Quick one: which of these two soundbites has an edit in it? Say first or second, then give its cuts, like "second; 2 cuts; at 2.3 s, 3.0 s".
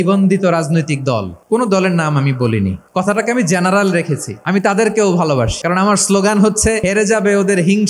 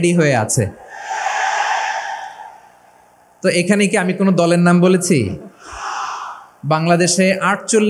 first; 5 cuts; at 1.3 s, 2.8 s, 4.3 s, 5.6 s, 6.8 s